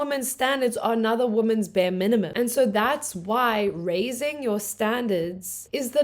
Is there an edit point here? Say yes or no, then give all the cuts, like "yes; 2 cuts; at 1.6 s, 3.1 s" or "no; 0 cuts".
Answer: yes; 1 cut; at 2.3 s